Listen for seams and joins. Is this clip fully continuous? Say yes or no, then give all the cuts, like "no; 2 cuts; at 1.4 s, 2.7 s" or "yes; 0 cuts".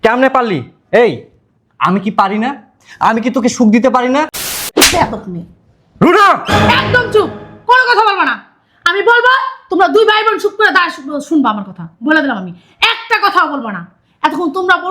no; 1 cut; at 4.6 s